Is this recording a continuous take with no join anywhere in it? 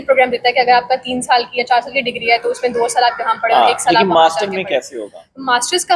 yes; 0 cuts

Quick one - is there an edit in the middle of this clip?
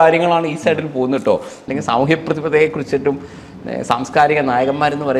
yes; 1 cut; at 1.6 s

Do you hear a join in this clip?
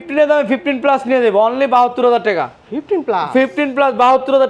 no; 0 cuts

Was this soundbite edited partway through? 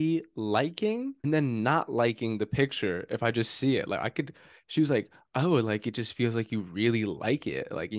yes; 1 cut; at 1.2 s

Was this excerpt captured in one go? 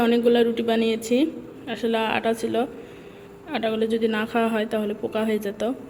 yes; 0 cuts

